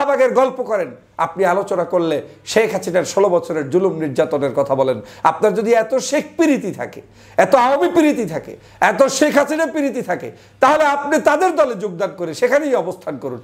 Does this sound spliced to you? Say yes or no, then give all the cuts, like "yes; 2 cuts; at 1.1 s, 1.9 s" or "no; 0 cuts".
no; 0 cuts